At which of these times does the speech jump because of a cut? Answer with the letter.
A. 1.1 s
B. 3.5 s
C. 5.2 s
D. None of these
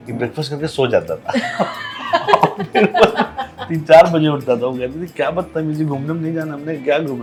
D